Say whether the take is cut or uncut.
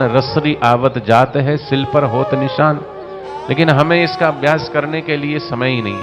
uncut